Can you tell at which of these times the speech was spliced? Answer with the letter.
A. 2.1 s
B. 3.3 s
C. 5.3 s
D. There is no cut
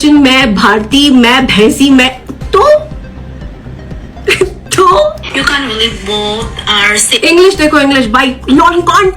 C